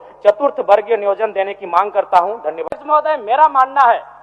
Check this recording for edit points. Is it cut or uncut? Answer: cut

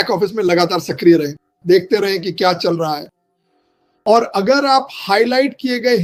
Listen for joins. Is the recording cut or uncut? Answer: uncut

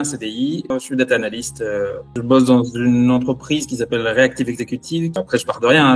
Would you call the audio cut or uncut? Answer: cut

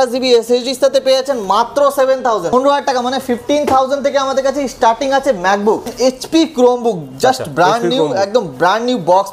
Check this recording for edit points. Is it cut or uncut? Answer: cut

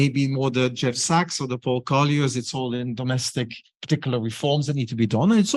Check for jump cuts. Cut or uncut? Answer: uncut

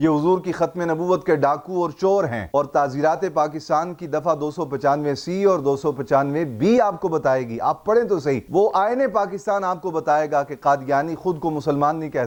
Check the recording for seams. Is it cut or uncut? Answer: uncut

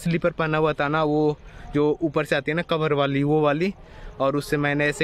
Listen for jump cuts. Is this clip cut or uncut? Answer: uncut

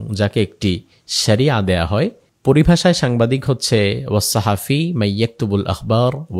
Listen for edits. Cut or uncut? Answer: cut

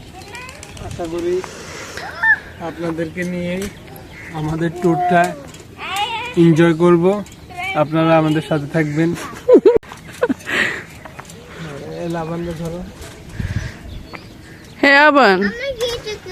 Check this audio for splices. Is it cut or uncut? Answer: cut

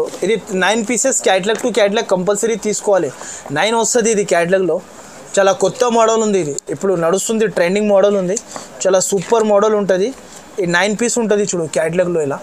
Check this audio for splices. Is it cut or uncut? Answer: uncut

